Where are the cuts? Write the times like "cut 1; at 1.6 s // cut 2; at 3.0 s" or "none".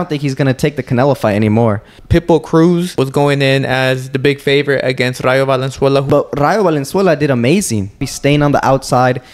cut 1; at 1.9 s // cut 2; at 2.9 s // cut 3; at 6.1 s // cut 4; at 8.1 s

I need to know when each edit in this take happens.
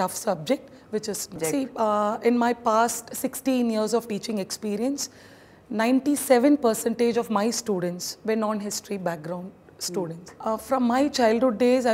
cut 1; at 1.4 s // cut 2; at 10.3 s

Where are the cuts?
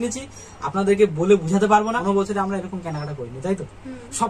cut 1; at 2.0 s

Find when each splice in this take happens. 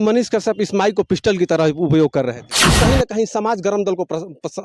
cut 1; at 2.6 s

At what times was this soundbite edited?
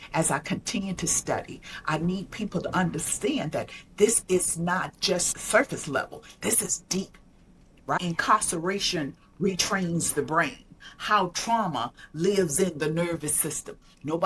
cut 1; at 5.3 s // cut 2; at 8.0 s

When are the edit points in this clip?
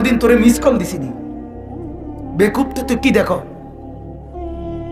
none

